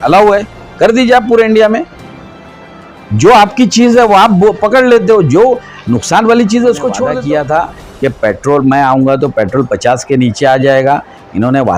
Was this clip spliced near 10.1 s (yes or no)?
no